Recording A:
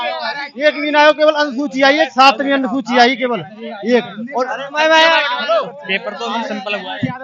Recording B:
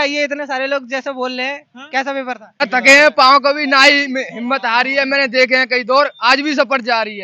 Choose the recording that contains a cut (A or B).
B